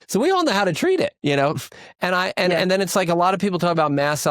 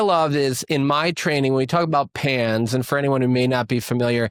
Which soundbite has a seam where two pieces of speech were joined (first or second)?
first